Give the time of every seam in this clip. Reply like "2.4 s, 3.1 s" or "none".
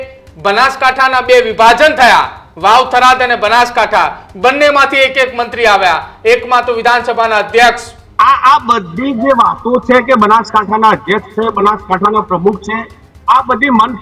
8.1 s